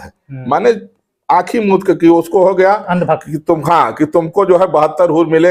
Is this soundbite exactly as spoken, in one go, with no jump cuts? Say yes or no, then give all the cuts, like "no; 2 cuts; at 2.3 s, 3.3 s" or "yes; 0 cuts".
yes; 0 cuts